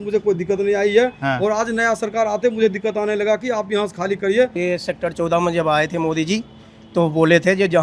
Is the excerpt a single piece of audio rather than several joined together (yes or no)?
no